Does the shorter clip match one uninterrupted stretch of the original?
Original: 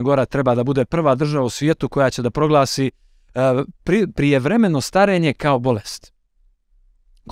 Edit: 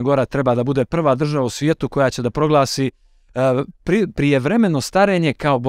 yes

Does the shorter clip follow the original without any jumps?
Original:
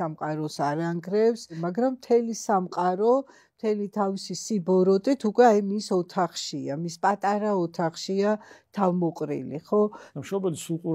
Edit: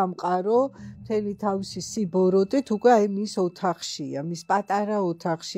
yes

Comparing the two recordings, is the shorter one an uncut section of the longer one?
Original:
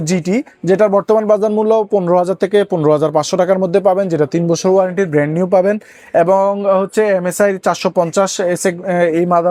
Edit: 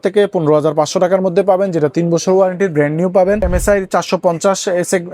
no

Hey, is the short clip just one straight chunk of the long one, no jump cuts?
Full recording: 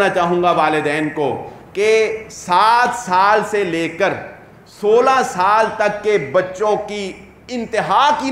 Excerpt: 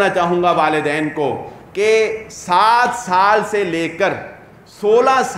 yes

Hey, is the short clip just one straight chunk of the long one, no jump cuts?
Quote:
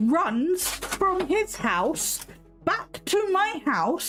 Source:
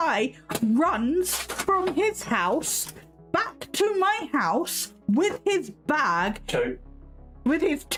yes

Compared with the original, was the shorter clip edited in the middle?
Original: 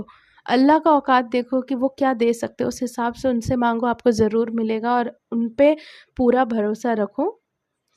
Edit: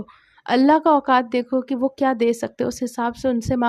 no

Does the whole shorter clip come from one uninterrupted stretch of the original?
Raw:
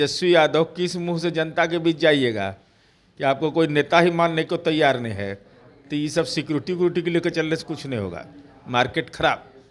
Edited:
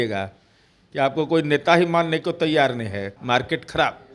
no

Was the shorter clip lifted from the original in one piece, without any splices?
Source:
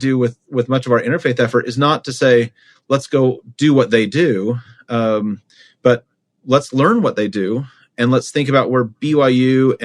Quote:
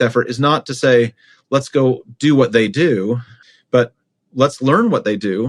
no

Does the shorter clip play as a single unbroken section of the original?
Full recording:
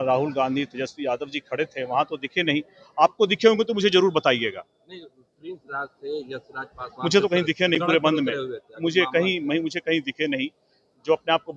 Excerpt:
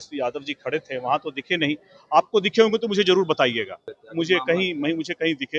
no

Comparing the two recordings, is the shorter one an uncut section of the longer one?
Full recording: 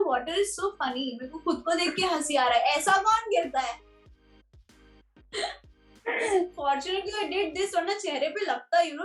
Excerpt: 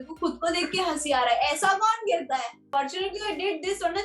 no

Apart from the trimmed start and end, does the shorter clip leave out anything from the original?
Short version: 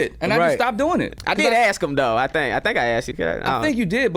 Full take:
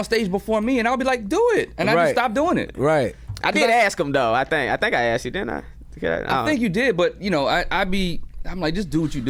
yes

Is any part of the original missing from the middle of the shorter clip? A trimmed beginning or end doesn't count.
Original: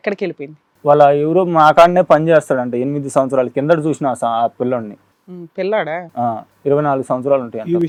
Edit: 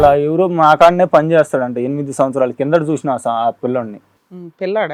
no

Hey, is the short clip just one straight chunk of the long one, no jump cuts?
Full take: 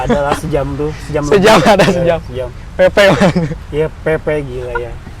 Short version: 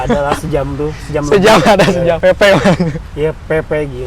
no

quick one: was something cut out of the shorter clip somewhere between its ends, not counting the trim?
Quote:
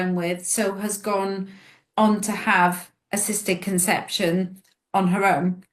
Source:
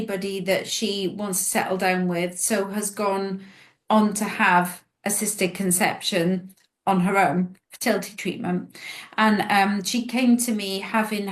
no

